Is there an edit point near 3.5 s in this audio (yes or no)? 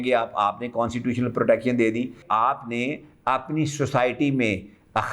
no